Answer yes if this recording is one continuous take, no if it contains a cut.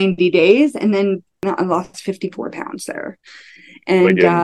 no